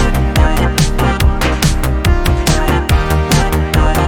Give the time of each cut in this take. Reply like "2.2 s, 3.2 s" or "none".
none

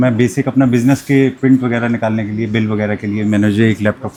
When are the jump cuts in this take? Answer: none

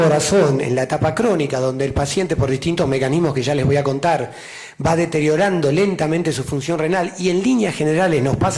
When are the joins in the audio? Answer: none

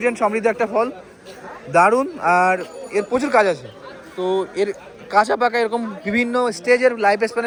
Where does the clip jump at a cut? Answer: none

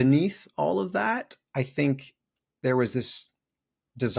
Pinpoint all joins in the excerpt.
none

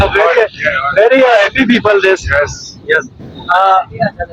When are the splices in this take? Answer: none

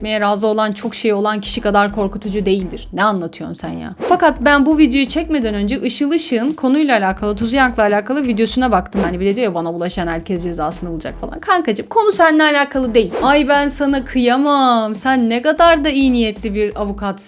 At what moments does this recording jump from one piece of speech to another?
4.0 s, 9.0 s, 13.1 s

